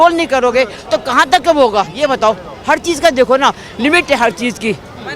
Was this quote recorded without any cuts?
yes; 0 cuts

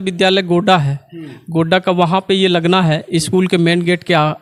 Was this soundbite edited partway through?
no; 0 cuts

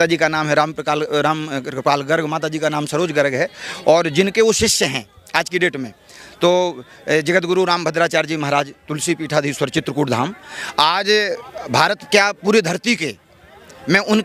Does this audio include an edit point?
no; 0 cuts

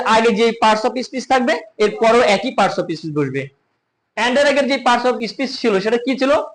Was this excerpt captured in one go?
no; 1 cut; at 5.3 s

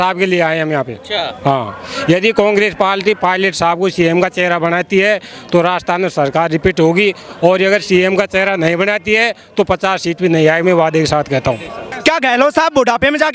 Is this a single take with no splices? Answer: no; 1 cut; at 11.8 s

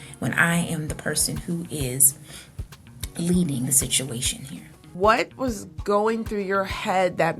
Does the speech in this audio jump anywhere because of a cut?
yes; 1 cut; at 4.9 s

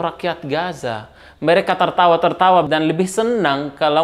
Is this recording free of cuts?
no; 1 cut; at 2.7 s

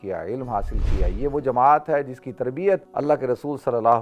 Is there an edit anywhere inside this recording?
yes; 1 cut; at 2.9 s

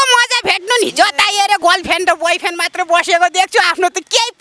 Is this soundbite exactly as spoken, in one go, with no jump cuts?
no; 1 cut; at 1.6 s

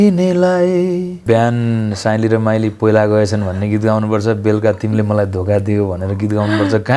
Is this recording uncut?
no; 1 cut; at 1.2 s

